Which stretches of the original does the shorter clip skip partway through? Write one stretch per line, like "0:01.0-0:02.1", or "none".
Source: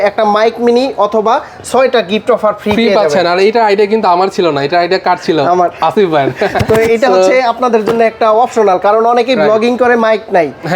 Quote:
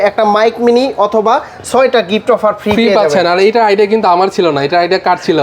none